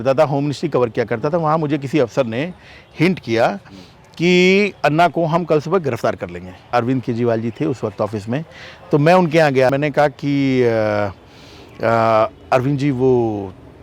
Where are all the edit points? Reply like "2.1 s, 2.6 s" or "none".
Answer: 6.7 s, 9.7 s